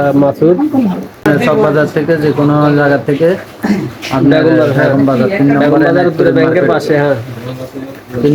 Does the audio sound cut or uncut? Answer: cut